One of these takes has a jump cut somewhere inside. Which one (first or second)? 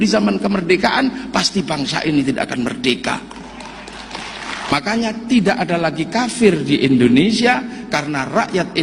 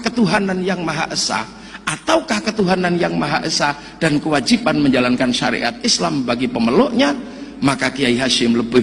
first